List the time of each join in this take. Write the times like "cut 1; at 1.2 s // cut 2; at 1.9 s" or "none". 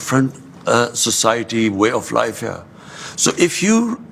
none